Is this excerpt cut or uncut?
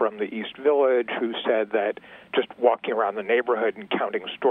uncut